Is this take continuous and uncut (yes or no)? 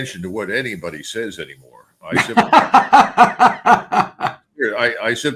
yes